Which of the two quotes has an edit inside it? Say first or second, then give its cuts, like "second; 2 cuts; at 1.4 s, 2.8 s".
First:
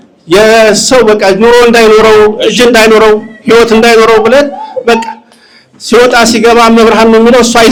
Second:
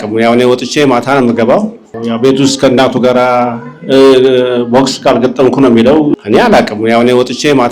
second; 2 cuts; at 1.9 s, 6.2 s